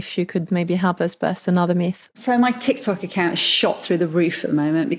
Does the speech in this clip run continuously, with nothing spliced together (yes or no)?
no